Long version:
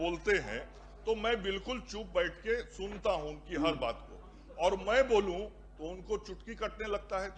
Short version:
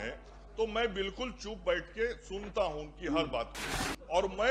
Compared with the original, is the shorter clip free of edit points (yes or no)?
yes